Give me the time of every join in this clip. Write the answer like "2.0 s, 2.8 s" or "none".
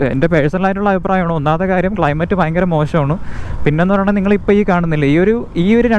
none